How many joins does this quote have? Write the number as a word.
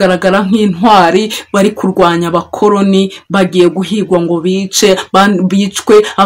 zero